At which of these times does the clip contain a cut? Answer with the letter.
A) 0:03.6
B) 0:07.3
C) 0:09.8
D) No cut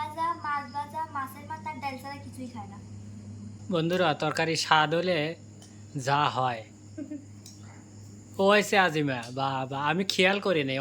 A